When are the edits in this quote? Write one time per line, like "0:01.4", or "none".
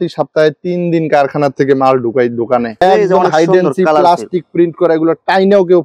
0:02.8